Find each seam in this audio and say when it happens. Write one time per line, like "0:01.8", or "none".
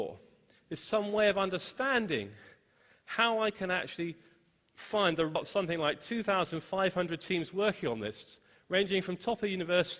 none